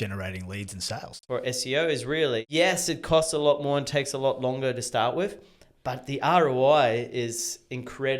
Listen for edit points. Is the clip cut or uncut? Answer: cut